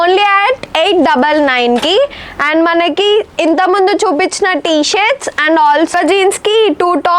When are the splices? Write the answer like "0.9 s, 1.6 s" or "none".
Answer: none